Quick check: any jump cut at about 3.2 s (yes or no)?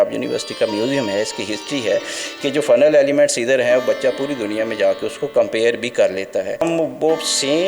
no